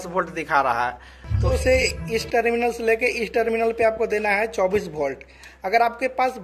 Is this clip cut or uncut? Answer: cut